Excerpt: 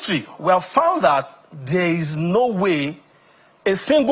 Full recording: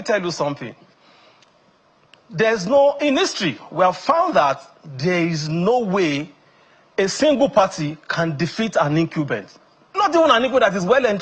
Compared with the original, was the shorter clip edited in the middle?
no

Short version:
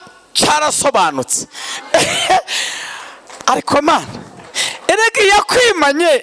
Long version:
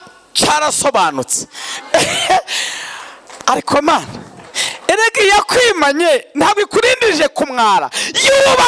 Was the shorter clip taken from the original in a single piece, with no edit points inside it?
yes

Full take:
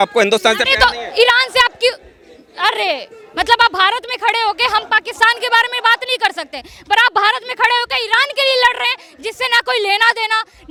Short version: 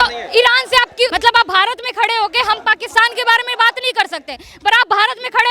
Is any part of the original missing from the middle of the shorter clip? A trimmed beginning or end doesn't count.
yes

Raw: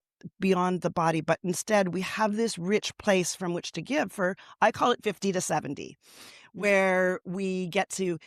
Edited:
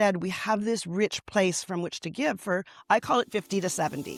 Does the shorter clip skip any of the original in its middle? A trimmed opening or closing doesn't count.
no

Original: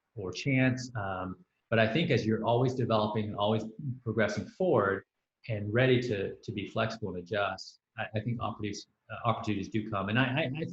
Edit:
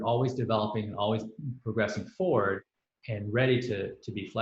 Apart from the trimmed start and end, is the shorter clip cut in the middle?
no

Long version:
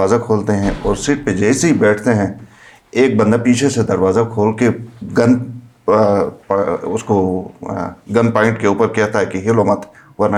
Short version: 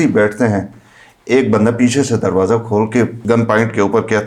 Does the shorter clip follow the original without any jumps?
no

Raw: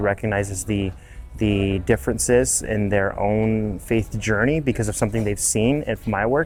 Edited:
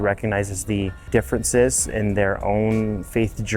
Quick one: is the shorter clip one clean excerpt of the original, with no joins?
no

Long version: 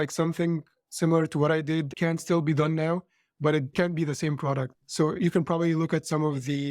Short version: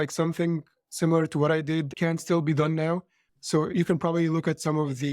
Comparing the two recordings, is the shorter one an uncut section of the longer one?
no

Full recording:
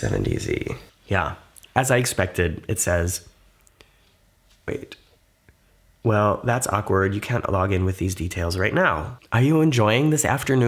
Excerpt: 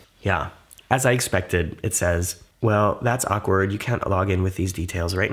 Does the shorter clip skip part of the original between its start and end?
yes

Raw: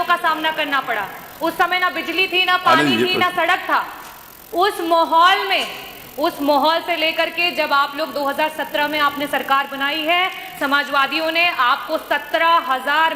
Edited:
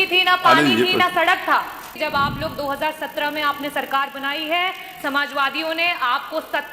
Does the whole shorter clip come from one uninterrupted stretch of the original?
no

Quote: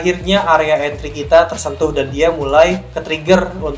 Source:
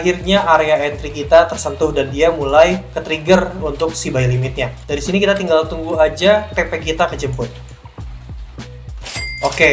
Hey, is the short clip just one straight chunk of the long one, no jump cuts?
yes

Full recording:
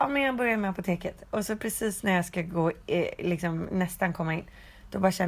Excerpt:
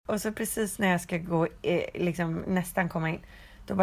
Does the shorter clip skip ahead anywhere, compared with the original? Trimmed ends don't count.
no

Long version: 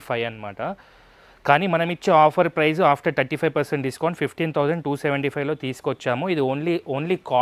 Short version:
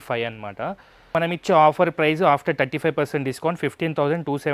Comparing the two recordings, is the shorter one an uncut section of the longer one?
no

